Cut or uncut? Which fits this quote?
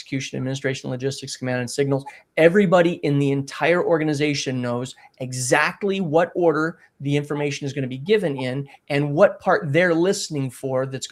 uncut